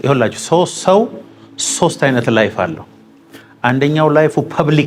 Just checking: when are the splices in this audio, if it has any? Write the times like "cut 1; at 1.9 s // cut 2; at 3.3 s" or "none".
none